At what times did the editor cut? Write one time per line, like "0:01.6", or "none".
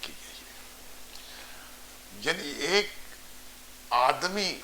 none